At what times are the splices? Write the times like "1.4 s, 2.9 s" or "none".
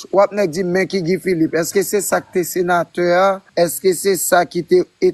3.4 s